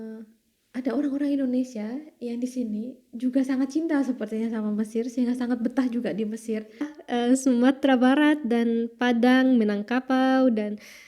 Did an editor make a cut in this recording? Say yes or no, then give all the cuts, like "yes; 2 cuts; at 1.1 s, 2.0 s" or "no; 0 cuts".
yes; 1 cut; at 7.0 s